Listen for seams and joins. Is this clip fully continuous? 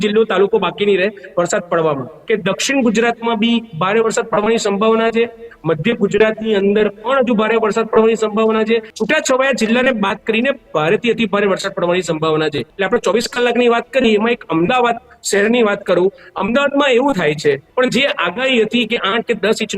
no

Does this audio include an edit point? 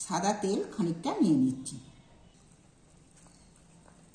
yes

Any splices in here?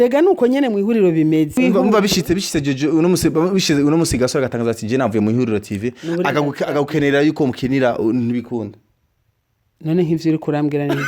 yes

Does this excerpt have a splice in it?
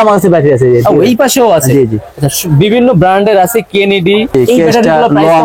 yes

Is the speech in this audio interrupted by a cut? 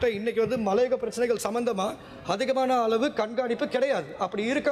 no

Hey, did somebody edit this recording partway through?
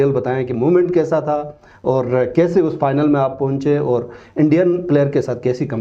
no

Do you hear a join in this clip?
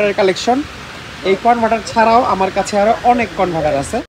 no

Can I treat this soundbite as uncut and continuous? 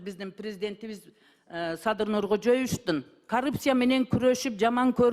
no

